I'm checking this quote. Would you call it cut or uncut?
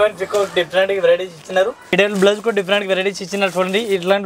cut